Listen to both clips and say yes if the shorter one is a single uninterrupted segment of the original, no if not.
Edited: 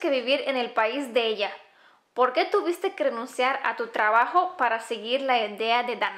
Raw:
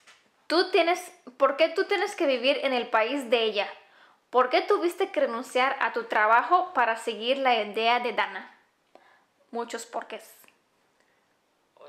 yes